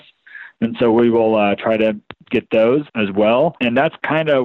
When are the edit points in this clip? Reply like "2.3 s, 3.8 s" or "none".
2.9 s, 3.6 s